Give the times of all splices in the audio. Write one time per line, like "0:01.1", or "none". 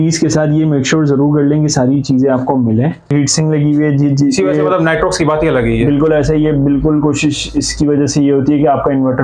0:03.1